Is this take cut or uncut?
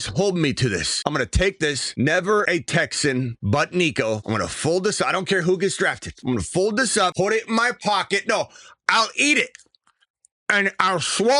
cut